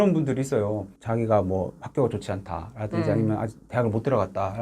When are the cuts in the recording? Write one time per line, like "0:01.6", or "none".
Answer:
0:00.9